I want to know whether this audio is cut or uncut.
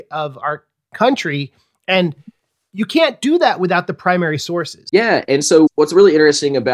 cut